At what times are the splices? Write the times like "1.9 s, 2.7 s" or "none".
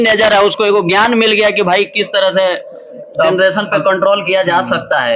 none